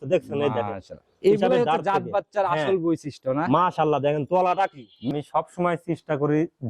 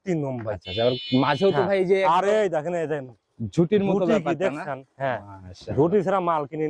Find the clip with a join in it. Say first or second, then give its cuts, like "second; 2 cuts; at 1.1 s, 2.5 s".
first; 1 cut; at 5.1 s